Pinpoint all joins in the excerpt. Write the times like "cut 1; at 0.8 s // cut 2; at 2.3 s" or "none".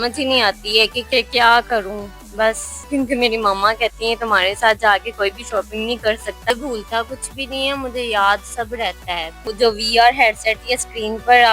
cut 1; at 2.8 s // cut 2; at 6.5 s // cut 3; at 9.5 s